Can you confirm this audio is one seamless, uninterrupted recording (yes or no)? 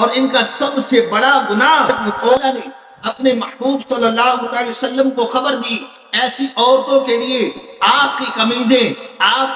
no